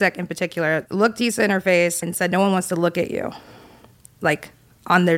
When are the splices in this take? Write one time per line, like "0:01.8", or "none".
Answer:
0:00.9
0:02.1